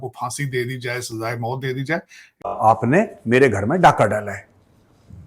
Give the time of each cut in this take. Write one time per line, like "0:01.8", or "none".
0:02.5